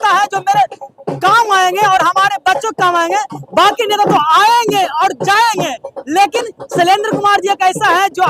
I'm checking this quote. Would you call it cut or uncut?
uncut